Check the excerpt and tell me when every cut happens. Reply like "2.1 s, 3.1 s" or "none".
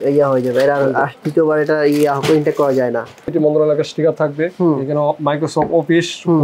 3.2 s